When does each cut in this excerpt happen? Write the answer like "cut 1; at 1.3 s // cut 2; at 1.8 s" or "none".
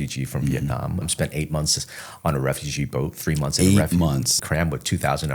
cut 1; at 1.0 s // cut 2; at 4.4 s

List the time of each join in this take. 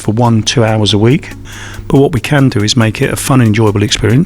cut 1; at 1.4 s

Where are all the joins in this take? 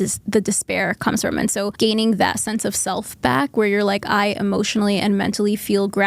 cut 1; at 1.7 s

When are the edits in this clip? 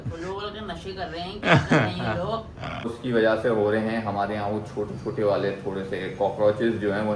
cut 1; at 2.9 s

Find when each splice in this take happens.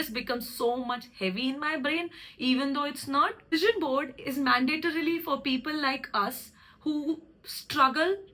cut 1; at 3.5 s

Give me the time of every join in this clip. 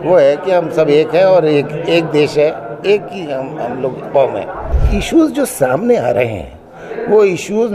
cut 1; at 4.7 s

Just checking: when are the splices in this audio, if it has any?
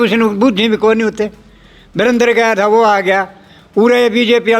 none

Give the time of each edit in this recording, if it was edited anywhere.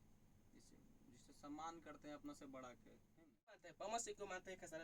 cut 1; at 3.7 s

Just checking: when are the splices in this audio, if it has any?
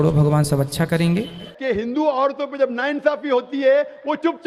cut 1; at 1.5 s

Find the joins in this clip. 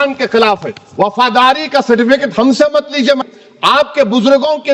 cut 1; at 3.2 s

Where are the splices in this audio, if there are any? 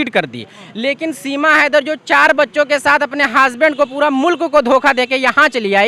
none

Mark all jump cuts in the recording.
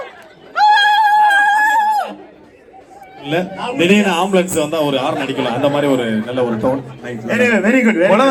none

